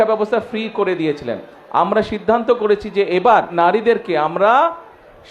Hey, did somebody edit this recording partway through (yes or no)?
yes